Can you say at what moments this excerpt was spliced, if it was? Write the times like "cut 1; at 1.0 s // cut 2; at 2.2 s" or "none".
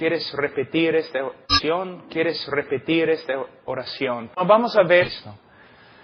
none